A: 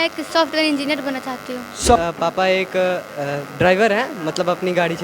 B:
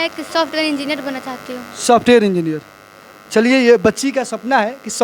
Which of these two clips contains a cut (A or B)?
A